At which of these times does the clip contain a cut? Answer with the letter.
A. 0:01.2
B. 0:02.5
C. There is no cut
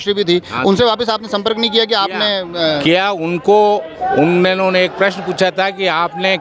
C